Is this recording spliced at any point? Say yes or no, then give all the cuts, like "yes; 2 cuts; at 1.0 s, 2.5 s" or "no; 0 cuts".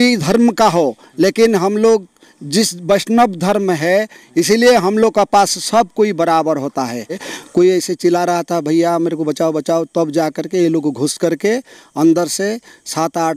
yes; 1 cut; at 7.3 s